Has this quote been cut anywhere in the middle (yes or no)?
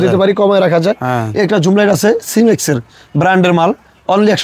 no